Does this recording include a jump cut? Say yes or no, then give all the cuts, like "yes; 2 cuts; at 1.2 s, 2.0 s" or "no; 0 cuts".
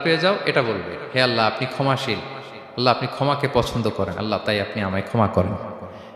no; 0 cuts